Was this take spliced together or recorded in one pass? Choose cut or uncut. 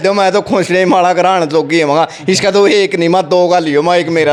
uncut